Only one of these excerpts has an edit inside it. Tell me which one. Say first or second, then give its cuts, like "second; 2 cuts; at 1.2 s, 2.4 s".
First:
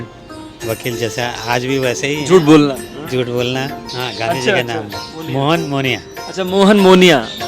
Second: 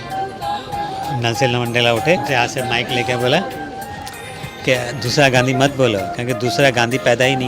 first; 1 cut; at 3.9 s